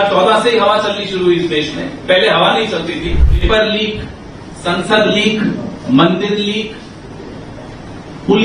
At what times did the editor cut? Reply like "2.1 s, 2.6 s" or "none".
3.4 s